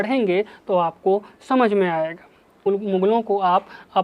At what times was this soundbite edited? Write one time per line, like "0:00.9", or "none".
0:02.7